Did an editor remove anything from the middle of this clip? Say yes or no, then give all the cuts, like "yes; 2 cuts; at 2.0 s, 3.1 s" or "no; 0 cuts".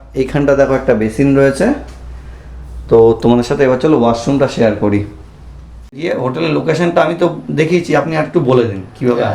yes; 1 cut; at 6.0 s